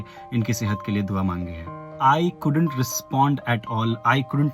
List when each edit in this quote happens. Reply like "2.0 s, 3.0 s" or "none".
1.9 s